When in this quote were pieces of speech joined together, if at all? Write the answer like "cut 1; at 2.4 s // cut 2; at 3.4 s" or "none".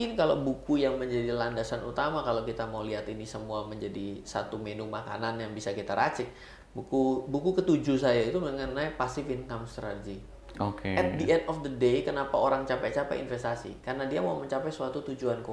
none